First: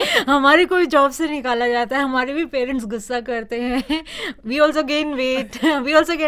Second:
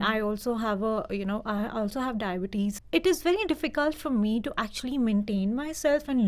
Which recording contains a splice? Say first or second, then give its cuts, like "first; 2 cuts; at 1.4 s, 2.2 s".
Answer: second; 1 cut; at 2.8 s